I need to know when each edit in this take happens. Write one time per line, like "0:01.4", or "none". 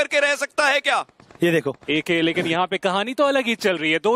0:01.2